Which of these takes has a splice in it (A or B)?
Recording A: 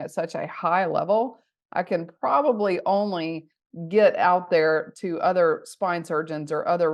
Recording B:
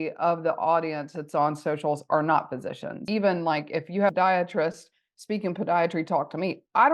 B